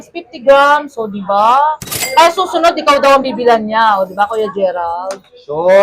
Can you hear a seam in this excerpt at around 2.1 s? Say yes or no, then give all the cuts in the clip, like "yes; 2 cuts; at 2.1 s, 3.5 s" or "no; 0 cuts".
no; 0 cuts